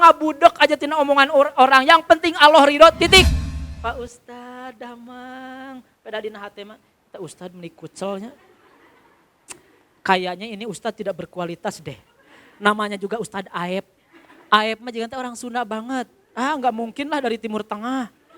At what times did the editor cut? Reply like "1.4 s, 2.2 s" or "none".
3.2 s